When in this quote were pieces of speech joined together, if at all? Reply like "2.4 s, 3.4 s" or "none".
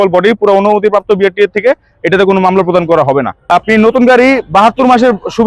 3.4 s

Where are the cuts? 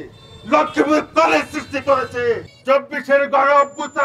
2.5 s

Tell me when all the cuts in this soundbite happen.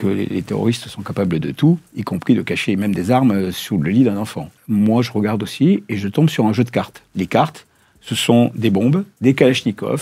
4.5 s, 7.0 s, 9.1 s

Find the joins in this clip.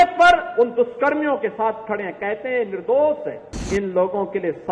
3.6 s

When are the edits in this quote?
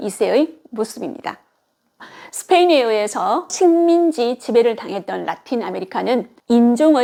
none

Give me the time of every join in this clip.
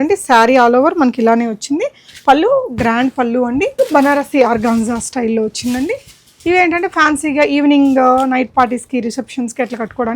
3.7 s

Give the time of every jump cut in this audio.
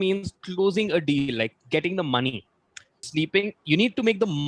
3.1 s

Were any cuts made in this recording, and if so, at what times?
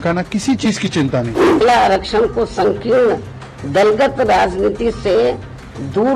1.6 s

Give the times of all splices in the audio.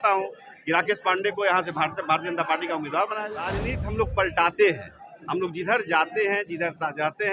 3.7 s

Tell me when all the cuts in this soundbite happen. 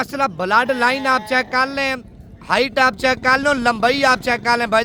none

